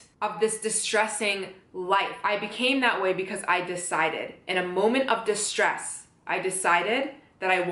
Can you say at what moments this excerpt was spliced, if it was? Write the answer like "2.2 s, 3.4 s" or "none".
2.1 s